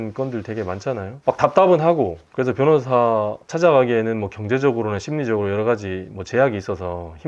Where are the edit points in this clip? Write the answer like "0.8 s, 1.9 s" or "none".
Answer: 1.1 s, 3.4 s

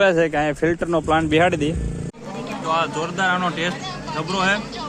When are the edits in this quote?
2.0 s

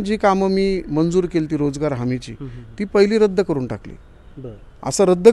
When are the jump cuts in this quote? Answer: none

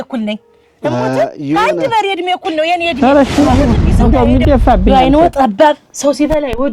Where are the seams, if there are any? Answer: 2.9 s

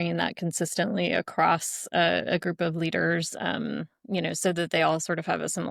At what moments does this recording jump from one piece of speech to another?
none

